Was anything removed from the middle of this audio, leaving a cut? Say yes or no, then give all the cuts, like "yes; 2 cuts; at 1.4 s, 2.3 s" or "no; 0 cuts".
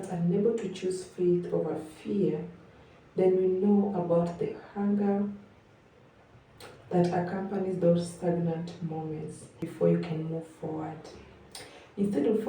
yes; 1 cut; at 9.6 s